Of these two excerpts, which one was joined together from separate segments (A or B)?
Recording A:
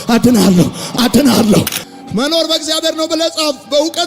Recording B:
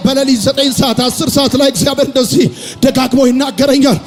A